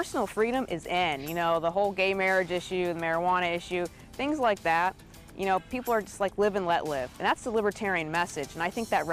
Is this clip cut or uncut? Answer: uncut